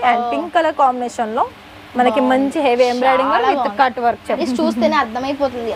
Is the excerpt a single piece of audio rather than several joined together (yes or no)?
no